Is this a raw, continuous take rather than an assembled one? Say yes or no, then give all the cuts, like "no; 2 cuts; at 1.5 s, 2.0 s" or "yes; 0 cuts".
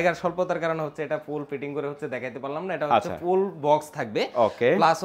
yes; 0 cuts